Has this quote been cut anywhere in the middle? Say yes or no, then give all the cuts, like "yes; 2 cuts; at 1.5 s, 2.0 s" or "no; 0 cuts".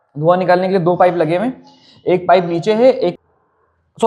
yes; 1 cut; at 3.2 s